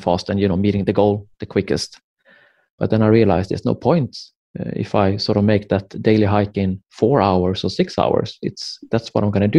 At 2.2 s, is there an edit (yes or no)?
no